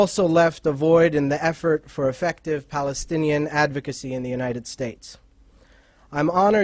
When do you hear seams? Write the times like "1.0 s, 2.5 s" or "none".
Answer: 1.1 s